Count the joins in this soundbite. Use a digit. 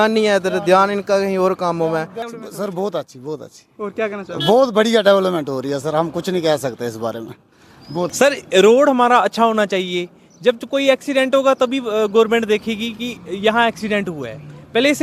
2